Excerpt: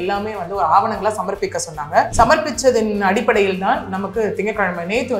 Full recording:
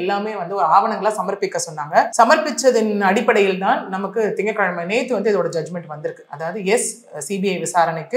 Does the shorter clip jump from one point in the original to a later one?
no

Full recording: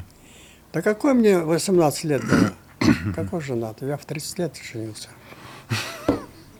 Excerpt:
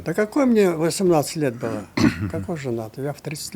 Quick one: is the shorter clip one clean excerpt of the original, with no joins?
no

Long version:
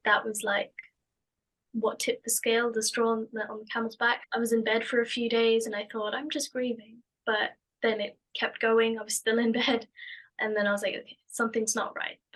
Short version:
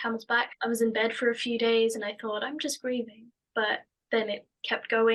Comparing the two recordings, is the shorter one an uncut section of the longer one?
yes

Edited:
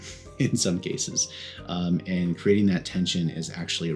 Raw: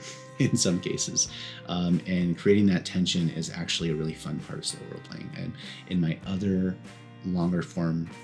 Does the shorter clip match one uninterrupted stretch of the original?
yes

